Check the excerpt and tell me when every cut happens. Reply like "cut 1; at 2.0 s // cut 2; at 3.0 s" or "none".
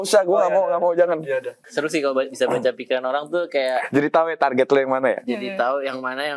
cut 1; at 1.6 s